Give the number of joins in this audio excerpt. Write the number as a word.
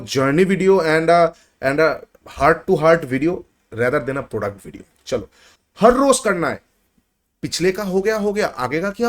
one